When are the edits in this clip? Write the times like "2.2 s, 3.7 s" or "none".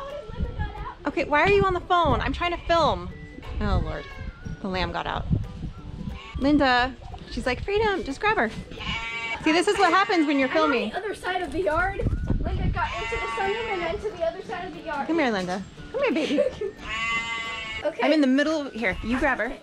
none